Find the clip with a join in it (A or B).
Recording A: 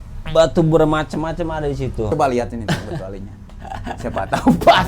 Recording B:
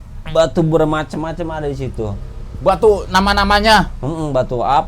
A